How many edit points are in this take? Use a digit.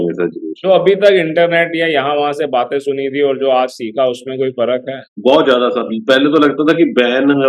1